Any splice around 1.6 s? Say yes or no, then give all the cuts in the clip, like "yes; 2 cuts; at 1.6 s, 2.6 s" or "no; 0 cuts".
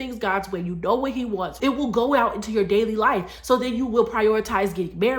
yes; 1 cut; at 1.6 s